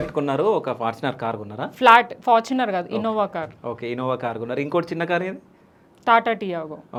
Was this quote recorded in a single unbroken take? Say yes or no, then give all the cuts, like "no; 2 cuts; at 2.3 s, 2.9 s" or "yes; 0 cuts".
yes; 0 cuts